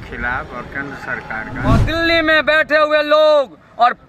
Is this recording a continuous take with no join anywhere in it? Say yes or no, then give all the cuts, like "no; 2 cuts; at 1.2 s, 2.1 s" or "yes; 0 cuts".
no; 1 cut; at 1.8 s